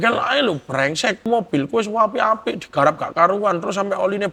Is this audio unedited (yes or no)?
no